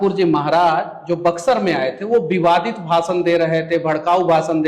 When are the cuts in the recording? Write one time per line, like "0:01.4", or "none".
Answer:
none